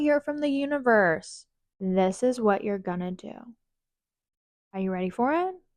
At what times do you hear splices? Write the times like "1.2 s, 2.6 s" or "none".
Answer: none